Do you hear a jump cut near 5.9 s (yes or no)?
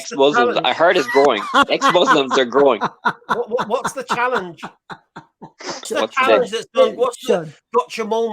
yes